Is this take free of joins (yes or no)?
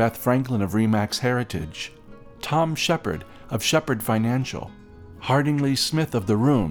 yes